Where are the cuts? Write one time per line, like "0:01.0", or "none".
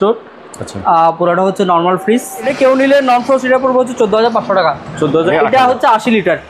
0:02.4
0:05.3